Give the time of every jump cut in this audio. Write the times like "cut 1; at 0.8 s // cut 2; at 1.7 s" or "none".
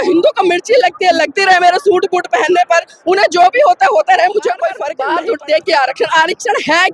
cut 1; at 4.9 s